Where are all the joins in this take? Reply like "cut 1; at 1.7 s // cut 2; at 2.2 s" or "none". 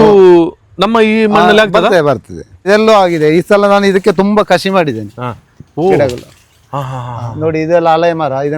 cut 1; at 2.7 s

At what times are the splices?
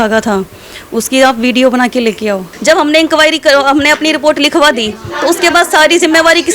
cut 1; at 2.5 s

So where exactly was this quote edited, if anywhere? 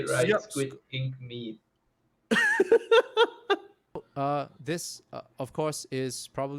cut 1; at 4.1 s

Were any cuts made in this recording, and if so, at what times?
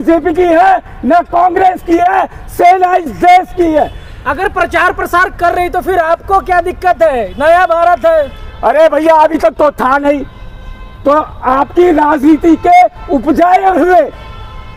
none

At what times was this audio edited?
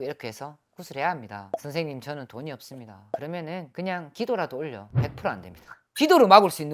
cut 1; at 1.4 s // cut 2; at 5.9 s

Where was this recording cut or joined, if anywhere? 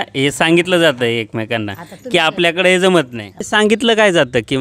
cut 1; at 3.5 s

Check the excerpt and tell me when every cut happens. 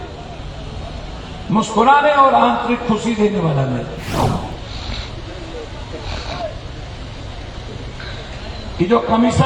cut 1; at 4.5 s

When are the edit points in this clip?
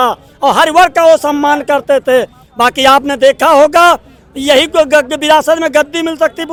none

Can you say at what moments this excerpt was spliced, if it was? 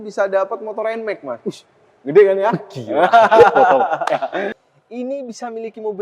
cut 1; at 4.6 s

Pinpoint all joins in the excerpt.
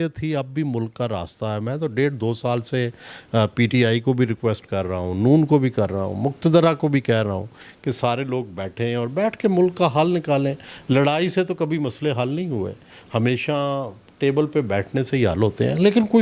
none

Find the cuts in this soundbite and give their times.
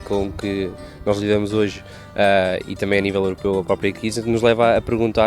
none

